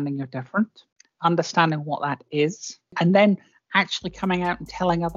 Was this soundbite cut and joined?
yes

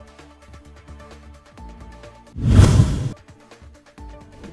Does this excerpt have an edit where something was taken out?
yes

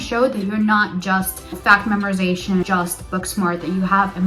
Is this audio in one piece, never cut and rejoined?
no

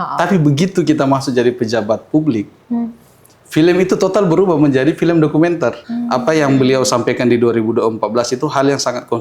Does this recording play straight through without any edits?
no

